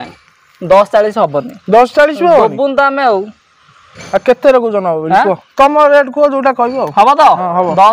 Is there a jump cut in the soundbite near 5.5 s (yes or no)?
no